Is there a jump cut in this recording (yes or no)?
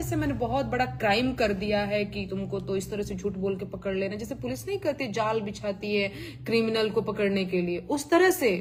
no